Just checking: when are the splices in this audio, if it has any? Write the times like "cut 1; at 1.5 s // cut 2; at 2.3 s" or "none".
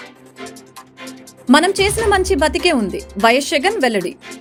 none